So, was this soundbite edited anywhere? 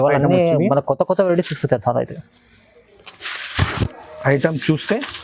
yes; 1 cut; at 3.9 s

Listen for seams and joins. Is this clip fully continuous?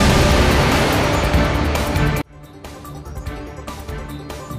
yes; 0 cuts

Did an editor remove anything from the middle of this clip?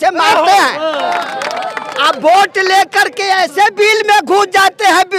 yes; 1 cut; at 1.0 s

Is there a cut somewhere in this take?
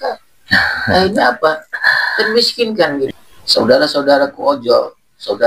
yes; 1 cut; at 3.1 s

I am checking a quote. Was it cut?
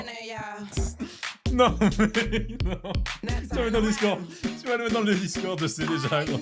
no; 0 cuts

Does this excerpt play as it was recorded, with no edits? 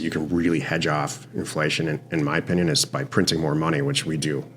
yes; 0 cuts

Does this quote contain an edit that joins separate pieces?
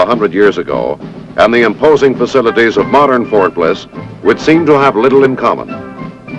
no; 0 cuts

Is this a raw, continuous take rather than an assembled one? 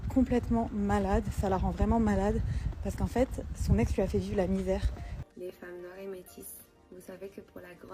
no; 1 cut; at 5.3 s

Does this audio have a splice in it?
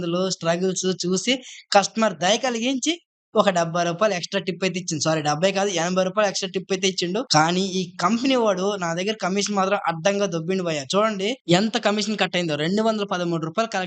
yes; 1 cut; at 7.3 s

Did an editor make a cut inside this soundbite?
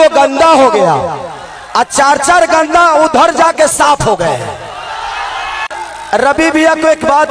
yes; 1 cut; at 5.7 s

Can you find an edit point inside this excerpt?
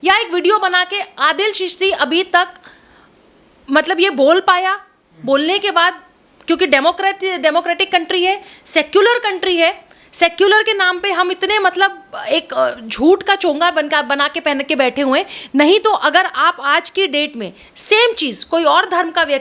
no; 0 cuts

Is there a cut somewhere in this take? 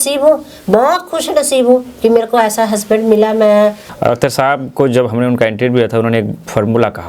yes; 1 cut; at 3.9 s

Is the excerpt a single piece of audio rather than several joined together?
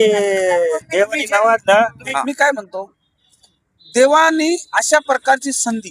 no; 1 cut; at 2.1 s

